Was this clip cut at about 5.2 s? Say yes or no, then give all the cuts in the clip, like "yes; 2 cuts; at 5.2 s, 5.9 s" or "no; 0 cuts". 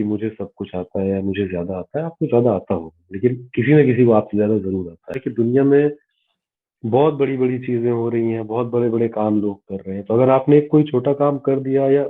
yes; 1 cut; at 5.2 s